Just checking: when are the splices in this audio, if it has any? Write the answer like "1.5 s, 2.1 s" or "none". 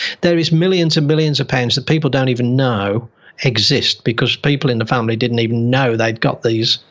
none